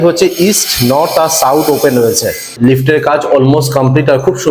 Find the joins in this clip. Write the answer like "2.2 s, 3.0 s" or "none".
2.5 s